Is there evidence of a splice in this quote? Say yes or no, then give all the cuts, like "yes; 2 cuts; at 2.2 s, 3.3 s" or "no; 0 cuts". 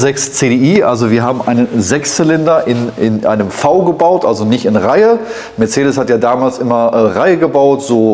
no; 0 cuts